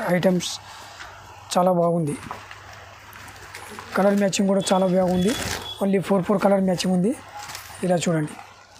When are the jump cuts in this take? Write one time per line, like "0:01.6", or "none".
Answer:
none